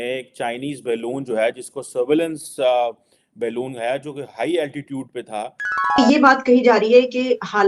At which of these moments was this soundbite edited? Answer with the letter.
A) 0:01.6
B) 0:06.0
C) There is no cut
B